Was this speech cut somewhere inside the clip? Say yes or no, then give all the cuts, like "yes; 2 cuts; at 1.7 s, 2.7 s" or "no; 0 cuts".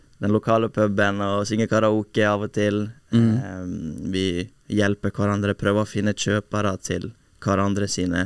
no; 0 cuts